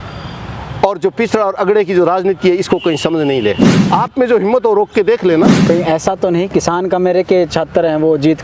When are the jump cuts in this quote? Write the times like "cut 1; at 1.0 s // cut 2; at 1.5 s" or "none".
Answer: cut 1; at 3.7 s // cut 2; at 5.6 s